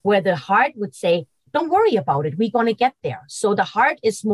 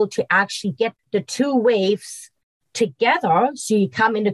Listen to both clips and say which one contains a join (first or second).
second